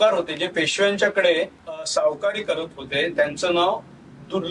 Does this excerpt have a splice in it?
yes; 1 cut; at 1.8 s

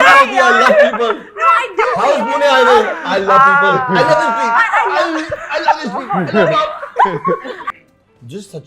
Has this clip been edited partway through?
yes; 1 cut; at 7.7 s

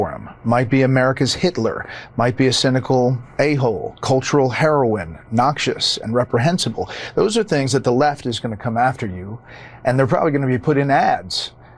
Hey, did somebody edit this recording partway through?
no; 0 cuts

